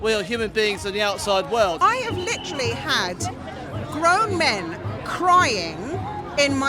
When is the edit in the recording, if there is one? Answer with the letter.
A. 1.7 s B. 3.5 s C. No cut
A